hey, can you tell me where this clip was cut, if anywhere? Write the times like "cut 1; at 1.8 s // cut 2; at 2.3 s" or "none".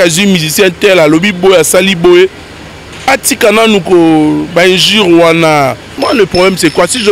cut 1; at 6.0 s